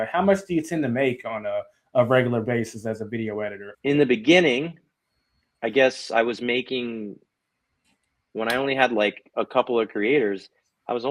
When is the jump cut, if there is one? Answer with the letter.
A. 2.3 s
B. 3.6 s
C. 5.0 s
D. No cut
B